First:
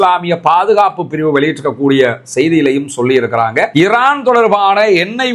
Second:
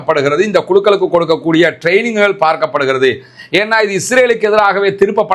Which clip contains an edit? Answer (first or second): first